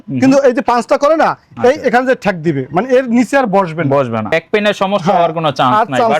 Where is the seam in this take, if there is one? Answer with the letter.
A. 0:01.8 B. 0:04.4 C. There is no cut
B